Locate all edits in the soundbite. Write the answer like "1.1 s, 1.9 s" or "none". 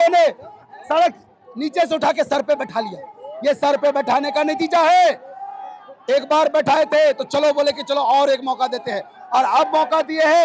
none